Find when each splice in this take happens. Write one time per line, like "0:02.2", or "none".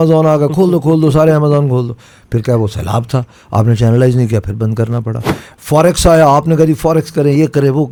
none